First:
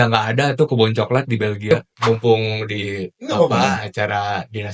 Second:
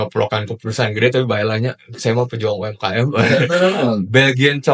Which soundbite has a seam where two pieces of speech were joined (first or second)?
first